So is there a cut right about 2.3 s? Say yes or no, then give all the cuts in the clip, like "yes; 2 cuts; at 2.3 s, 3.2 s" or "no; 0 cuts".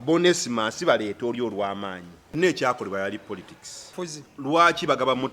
yes; 2 cuts; at 2.3 s, 3.9 s